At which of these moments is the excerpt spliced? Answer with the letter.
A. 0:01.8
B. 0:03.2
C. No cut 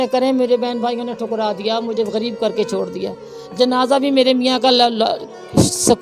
C